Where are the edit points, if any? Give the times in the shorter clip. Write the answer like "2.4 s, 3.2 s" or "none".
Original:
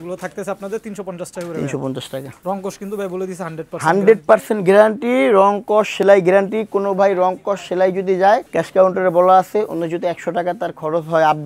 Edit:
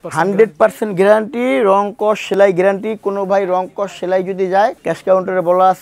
none